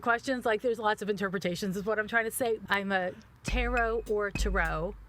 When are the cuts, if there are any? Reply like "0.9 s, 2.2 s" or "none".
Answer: 2.6 s